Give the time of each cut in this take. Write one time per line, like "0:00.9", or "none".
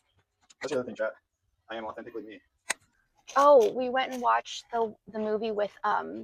0:02.9